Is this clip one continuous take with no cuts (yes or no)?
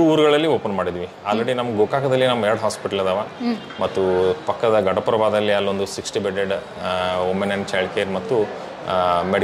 yes